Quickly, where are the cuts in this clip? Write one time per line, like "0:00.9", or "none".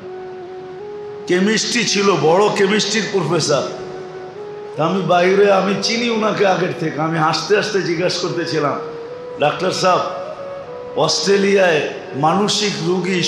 0:01.3